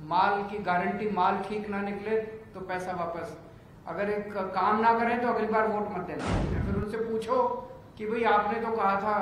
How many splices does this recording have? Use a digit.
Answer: 1